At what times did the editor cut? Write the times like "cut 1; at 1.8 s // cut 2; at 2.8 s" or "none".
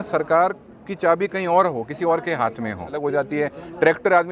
cut 1; at 2.9 s